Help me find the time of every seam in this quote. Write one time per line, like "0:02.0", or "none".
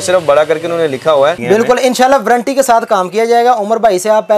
0:01.4